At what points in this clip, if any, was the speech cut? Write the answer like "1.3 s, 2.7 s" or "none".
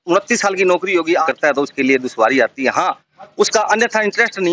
1.2 s